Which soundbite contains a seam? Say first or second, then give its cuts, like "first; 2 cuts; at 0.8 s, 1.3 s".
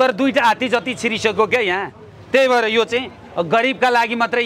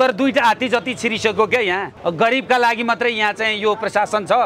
second; 1 cut; at 1.9 s